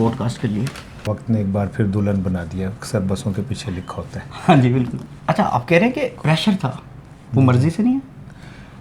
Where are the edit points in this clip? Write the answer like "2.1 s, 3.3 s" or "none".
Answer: 1.1 s, 5.1 s